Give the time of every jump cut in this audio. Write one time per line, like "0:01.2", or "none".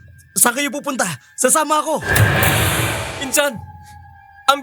0:02.0
0:03.2